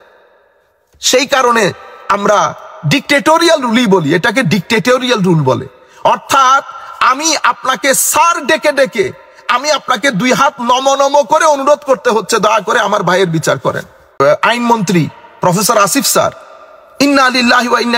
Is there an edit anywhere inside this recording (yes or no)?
yes